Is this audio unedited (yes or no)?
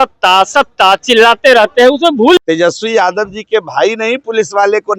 no